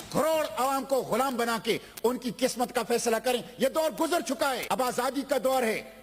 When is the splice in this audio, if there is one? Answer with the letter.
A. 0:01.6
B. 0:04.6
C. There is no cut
B